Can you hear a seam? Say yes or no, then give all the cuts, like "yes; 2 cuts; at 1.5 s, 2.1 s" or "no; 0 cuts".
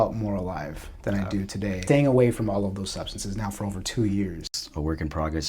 yes; 2 cuts; at 1.8 s, 4.4 s